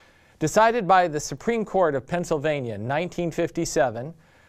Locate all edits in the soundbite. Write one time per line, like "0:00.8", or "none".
none